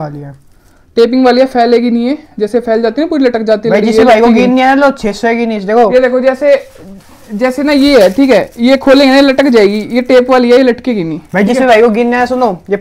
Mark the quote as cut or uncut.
uncut